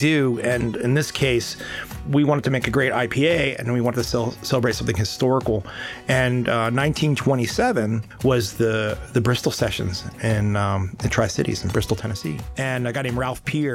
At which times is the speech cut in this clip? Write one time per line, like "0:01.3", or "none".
0:02.0
0:08.1
0:12.4